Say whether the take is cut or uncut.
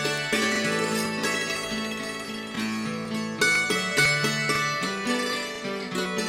uncut